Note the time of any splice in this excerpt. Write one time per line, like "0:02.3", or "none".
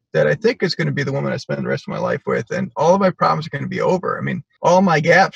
0:04.4